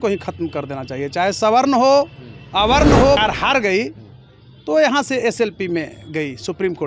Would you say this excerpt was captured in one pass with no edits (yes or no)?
no